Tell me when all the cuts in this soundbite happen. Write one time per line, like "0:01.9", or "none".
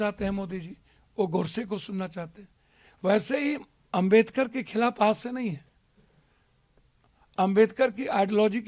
none